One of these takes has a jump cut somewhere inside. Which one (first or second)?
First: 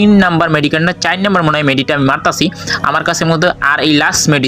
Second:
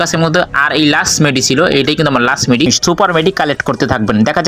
second